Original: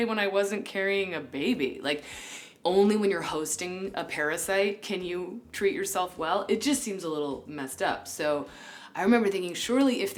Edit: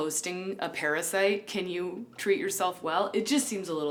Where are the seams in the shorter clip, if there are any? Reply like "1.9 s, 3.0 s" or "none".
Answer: none